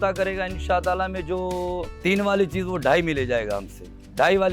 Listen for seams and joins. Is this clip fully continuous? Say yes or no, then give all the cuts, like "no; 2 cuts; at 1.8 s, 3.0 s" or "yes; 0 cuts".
yes; 0 cuts